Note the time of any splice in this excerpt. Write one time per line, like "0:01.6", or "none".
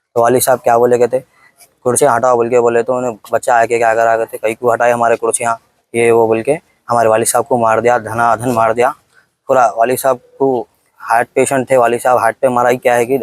none